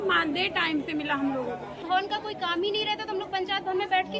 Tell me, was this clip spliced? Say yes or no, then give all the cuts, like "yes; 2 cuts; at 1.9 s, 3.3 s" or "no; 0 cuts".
yes; 1 cut; at 1.8 s